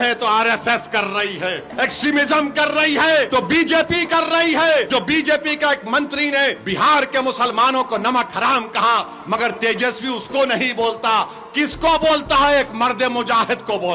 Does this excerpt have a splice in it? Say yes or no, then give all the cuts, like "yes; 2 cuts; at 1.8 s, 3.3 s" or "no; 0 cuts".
yes; 4 cuts; at 1.7 s, 3.3 s, 4.9 s, 6.6 s